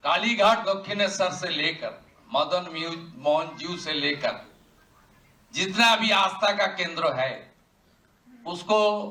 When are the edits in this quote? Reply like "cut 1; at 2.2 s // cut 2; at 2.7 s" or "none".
none

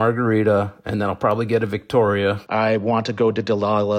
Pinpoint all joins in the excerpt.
cut 1; at 2.4 s

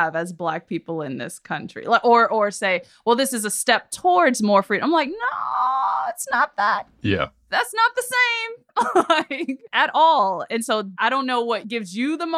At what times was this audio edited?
none

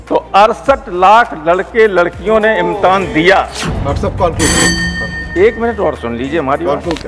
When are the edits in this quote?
cut 1; at 3.7 s

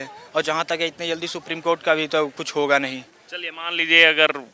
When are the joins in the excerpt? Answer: none

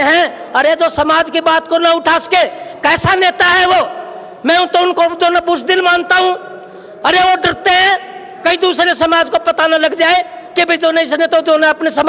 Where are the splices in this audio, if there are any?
none

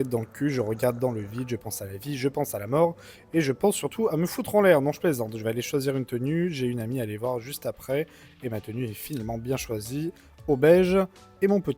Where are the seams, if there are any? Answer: none

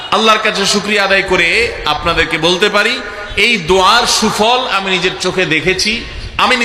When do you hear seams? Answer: none

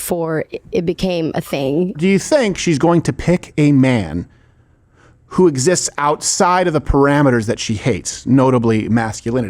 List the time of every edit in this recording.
cut 1; at 2.0 s

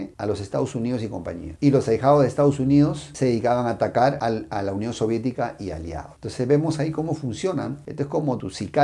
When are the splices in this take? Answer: none

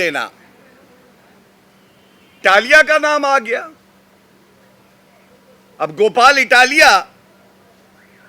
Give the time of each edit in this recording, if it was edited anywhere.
cut 1; at 2.4 s

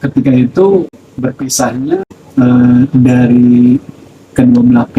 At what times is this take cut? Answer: cut 1; at 1.0 s // cut 2; at 2.2 s

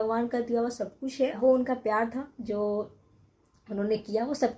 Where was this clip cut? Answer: cut 1; at 1.4 s

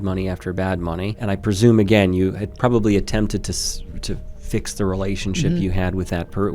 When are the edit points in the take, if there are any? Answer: cut 1; at 1.2 s

